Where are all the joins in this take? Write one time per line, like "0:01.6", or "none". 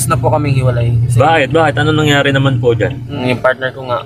0:03.0